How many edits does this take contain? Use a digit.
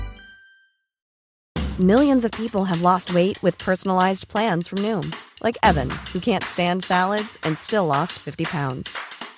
1